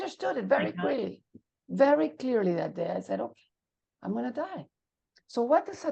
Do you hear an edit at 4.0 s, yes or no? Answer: no